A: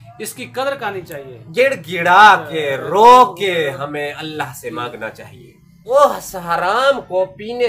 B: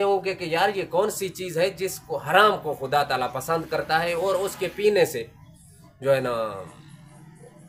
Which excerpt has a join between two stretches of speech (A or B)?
A